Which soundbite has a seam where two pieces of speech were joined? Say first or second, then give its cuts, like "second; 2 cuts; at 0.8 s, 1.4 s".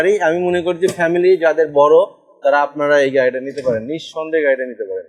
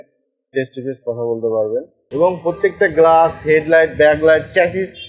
second; 1 cut; at 2.1 s